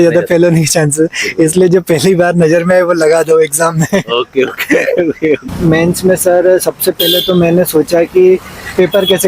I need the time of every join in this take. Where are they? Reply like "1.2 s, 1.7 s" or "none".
5.5 s